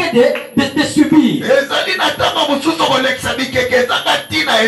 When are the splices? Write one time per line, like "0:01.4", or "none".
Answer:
none